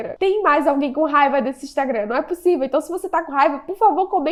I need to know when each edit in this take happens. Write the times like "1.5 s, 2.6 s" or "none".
none